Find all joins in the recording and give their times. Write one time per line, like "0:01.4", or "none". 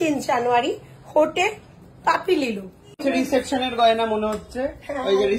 0:03.0